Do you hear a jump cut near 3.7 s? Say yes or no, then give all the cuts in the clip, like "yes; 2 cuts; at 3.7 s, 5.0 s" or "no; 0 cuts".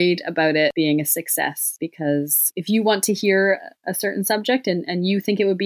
no; 3 cuts; at 0.7 s, 1.7 s, 2.5 s